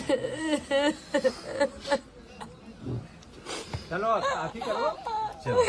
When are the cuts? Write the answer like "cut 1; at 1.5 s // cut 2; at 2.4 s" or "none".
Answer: none